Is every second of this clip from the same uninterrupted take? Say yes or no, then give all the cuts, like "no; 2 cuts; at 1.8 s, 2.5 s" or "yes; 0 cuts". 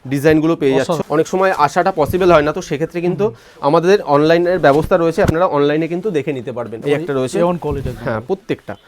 no; 2 cuts; at 1.0 s, 6.8 s